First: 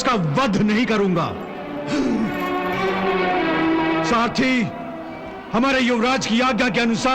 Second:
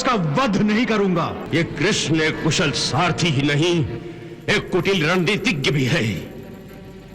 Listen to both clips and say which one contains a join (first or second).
second